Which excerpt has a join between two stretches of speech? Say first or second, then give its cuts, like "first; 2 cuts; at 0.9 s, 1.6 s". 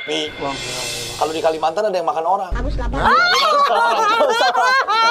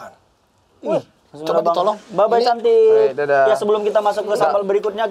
second; 1 cut; at 1.2 s